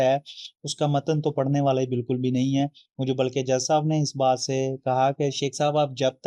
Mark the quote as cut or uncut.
uncut